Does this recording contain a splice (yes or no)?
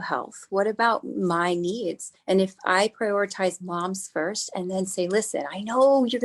yes